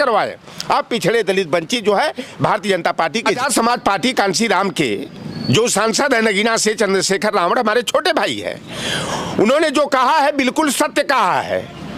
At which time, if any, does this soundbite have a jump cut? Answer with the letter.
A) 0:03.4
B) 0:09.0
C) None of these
A